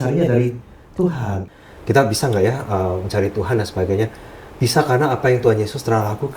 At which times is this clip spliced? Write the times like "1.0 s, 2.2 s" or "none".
1.4 s